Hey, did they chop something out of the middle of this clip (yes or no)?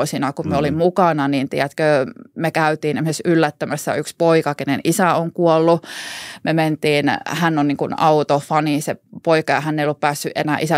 no